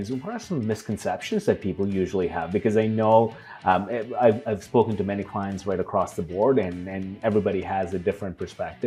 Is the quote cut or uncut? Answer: uncut